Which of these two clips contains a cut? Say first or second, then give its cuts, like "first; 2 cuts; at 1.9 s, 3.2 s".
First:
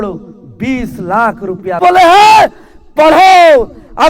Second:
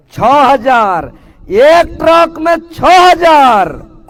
first; 1 cut; at 1.8 s